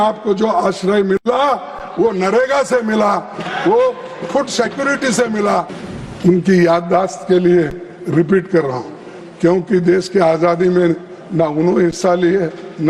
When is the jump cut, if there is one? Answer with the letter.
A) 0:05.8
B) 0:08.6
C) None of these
A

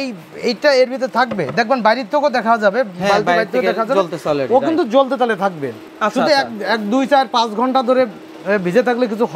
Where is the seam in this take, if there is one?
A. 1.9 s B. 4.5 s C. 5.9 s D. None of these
C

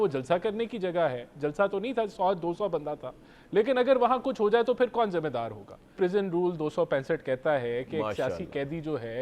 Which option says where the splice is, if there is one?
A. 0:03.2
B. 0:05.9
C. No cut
B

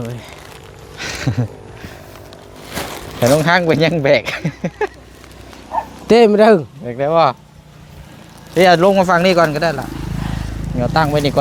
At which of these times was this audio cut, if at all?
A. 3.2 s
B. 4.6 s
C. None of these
C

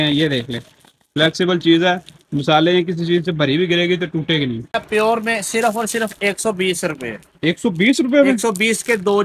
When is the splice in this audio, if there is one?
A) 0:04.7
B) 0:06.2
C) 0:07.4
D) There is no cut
A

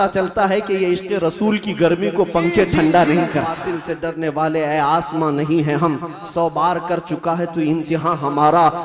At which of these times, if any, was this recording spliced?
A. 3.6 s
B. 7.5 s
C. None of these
A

